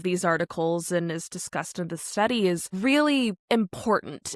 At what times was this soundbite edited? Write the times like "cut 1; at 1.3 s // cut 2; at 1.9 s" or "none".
cut 1; at 2.7 s // cut 2; at 3.4 s